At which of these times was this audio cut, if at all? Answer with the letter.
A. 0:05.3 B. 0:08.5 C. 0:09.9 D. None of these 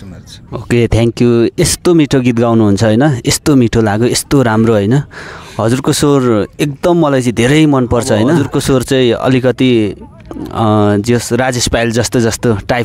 B